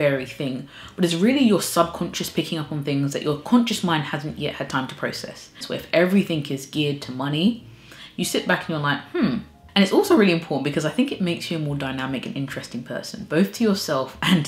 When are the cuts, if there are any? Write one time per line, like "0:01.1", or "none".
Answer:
0:05.6
0:09.6